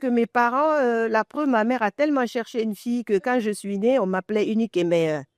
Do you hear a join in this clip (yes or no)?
no